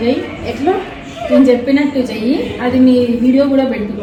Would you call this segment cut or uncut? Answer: uncut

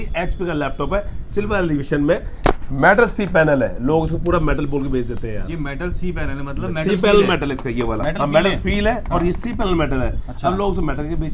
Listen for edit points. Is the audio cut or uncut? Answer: uncut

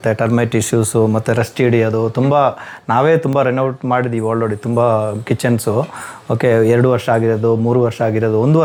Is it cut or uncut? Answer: uncut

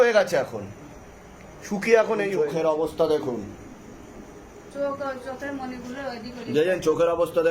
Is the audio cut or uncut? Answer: cut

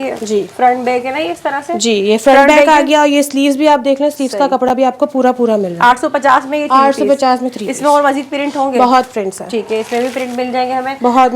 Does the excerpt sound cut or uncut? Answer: uncut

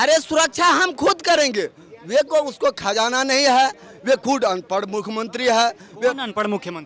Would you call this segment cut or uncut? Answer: uncut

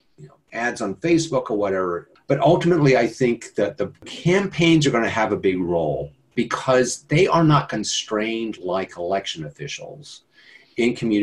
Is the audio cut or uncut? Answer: cut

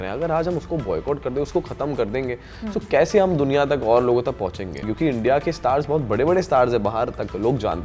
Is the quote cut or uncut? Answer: cut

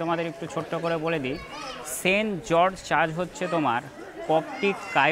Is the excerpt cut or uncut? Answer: uncut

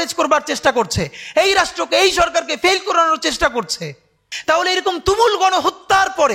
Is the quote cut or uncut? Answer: cut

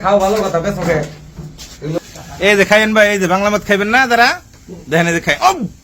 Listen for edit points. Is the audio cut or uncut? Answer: cut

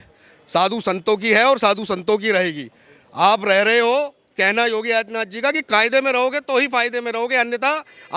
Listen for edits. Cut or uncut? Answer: uncut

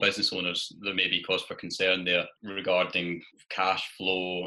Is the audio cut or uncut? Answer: cut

